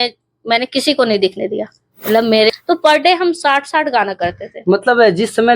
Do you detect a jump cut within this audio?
yes; 1 cut; at 2.5 s

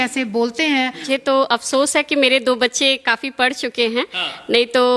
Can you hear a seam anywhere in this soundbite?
yes; 1 cut; at 1.0 s

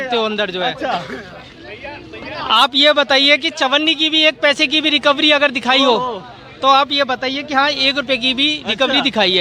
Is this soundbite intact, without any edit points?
yes; 0 cuts

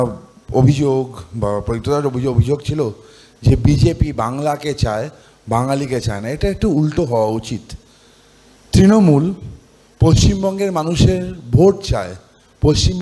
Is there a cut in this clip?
no; 0 cuts

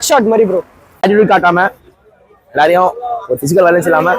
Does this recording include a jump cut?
yes; 1 cut; at 1.0 s

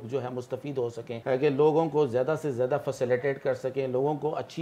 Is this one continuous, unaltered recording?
no; 1 cut; at 1.1 s

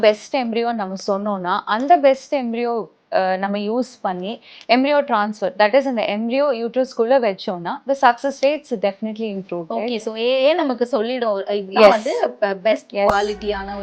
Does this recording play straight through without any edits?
yes; 0 cuts

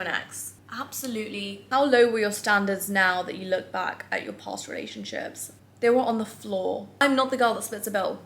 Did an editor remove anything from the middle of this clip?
yes; 2 cuts; at 1.6 s, 6.9 s

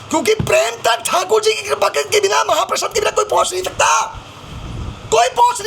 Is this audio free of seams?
yes; 0 cuts

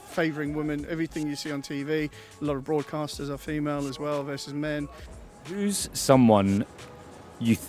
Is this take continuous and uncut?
no; 1 cut; at 5.1 s

